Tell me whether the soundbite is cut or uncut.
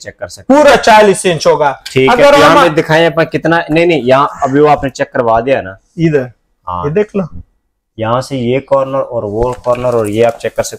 uncut